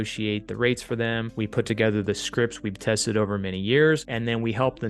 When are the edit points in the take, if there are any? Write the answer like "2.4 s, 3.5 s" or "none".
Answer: 1.3 s, 4.1 s